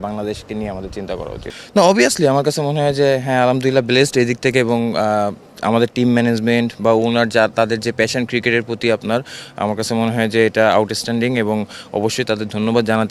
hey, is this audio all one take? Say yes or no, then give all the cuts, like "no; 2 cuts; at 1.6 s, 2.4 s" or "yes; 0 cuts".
yes; 0 cuts